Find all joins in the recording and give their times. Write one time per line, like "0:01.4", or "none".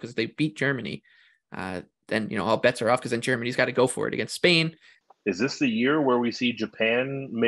0:04.9